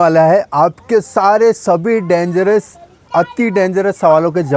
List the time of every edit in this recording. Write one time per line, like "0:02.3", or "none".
0:03.0